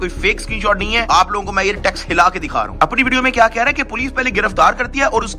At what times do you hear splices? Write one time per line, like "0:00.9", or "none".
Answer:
none